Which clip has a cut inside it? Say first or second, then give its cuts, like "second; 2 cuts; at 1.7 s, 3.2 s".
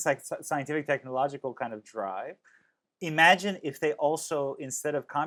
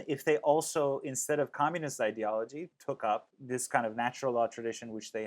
second; 2 cuts; at 2.7 s, 3.3 s